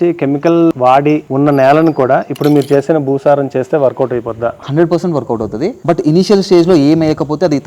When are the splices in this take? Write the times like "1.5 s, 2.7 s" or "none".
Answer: 0.9 s, 5.8 s